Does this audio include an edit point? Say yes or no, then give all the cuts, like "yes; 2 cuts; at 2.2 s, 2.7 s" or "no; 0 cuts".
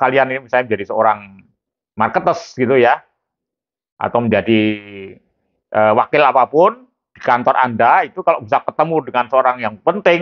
no; 0 cuts